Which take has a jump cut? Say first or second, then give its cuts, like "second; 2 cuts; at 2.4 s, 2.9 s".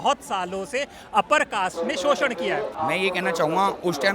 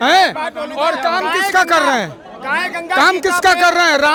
first; 1 cut; at 2.7 s